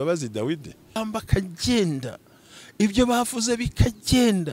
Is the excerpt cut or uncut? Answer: cut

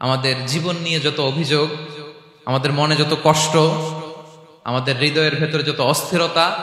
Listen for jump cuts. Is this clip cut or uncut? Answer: uncut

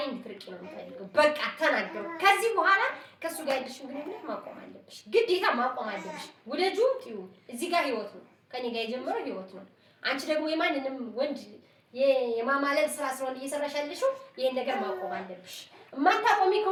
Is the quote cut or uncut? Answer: uncut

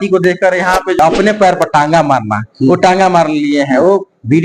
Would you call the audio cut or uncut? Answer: cut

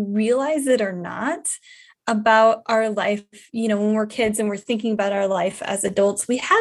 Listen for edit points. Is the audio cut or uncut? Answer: uncut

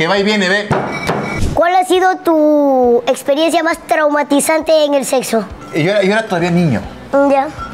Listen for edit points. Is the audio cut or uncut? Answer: cut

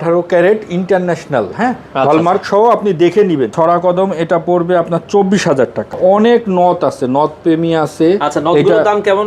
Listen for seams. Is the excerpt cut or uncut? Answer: cut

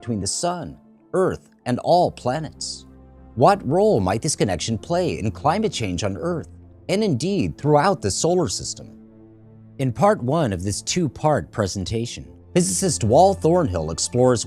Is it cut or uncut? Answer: cut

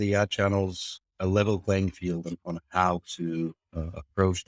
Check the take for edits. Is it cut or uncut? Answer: uncut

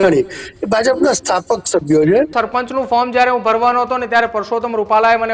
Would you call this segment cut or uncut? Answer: cut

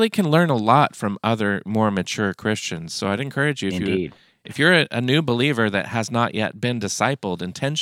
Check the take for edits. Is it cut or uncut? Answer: uncut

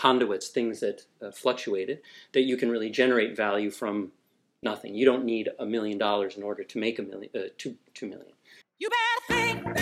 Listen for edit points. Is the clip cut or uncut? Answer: cut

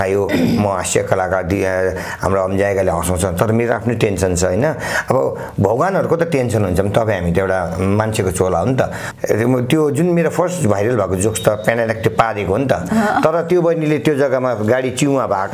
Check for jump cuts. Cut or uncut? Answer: cut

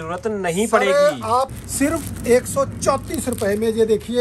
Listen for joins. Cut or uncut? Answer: cut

